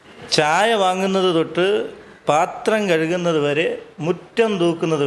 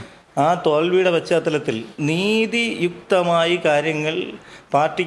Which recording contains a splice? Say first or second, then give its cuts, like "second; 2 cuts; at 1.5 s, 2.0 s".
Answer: second; 1 cut; at 1.9 s